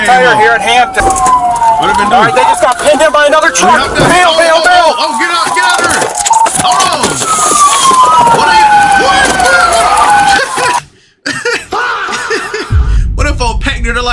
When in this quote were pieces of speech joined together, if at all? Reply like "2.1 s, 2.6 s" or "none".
1.0 s